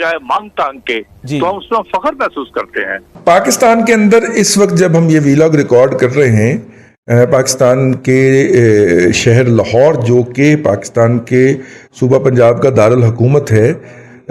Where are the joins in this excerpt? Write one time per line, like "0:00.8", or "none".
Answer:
0:03.0